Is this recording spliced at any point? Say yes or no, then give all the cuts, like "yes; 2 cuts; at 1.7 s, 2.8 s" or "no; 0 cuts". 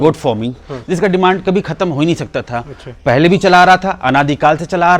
no; 0 cuts